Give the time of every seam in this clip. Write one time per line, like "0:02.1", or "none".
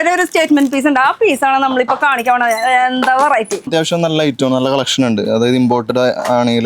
0:03.7